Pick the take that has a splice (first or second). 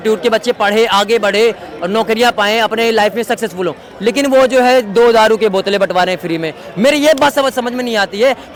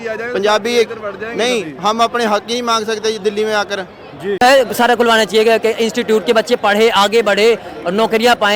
second